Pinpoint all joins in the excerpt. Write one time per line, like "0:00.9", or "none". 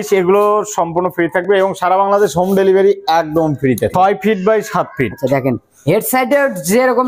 0:03.9